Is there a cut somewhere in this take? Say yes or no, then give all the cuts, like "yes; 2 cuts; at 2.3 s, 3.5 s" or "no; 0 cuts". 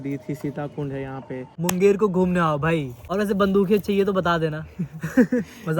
yes; 2 cuts; at 1.4 s, 3.0 s